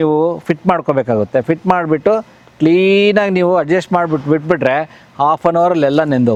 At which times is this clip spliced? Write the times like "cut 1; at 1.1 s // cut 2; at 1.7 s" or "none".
none

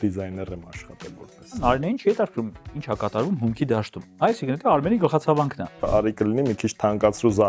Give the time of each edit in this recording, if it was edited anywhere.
cut 1; at 1.6 s // cut 2; at 4.0 s // cut 3; at 5.9 s

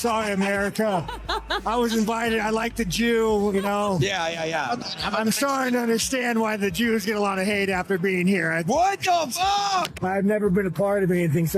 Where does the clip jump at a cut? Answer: cut 1; at 9.8 s

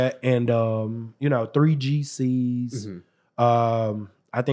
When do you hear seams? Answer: cut 1; at 1.0 s

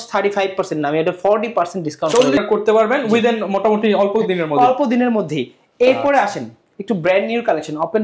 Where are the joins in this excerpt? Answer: cut 1; at 2.4 s

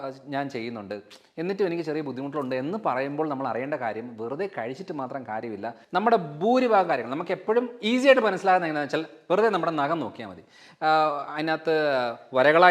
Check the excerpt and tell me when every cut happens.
cut 1; at 5.8 s

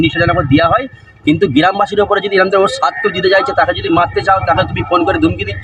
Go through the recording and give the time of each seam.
none

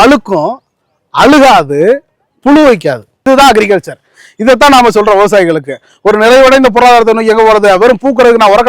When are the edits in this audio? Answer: cut 1; at 3.2 s

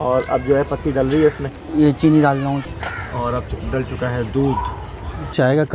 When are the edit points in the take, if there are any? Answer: cut 1; at 1.5 s // cut 2; at 2.6 s

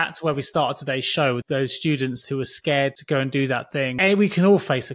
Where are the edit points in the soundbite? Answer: cut 1; at 1.4 s // cut 2; at 3.0 s // cut 3; at 3.9 s

